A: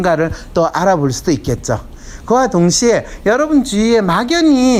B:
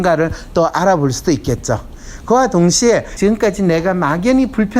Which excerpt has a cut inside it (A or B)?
B